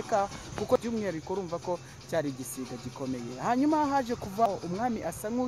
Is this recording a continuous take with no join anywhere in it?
no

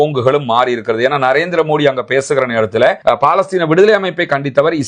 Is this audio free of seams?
no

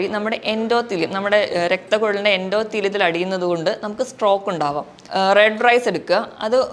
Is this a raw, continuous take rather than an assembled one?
no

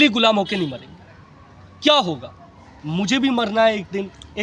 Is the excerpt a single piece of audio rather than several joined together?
yes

